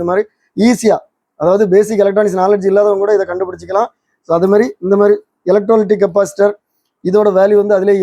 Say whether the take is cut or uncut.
uncut